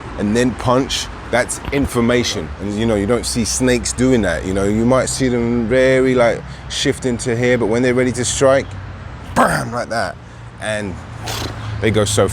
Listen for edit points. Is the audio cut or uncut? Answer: cut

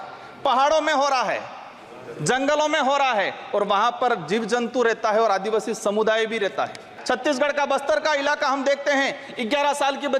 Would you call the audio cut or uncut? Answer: cut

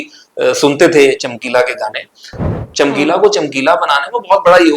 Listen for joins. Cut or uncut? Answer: cut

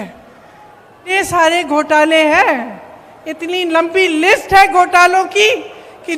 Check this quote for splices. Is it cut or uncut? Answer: cut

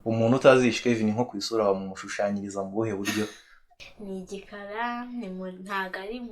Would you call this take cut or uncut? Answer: cut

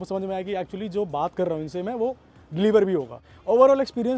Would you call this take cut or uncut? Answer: cut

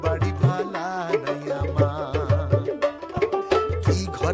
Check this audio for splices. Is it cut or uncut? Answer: uncut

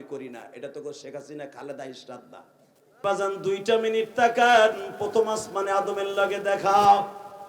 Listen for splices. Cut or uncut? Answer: cut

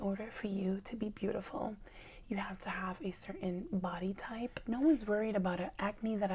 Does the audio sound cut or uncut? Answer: cut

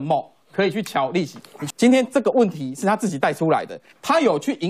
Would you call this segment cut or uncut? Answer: cut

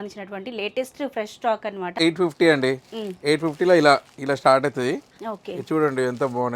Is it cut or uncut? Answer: cut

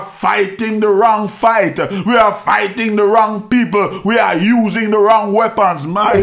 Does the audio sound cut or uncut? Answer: uncut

